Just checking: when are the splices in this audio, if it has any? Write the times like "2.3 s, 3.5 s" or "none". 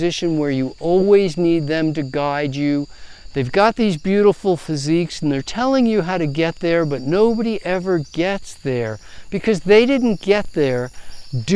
none